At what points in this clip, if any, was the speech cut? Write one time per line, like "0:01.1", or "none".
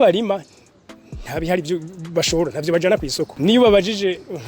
0:03.3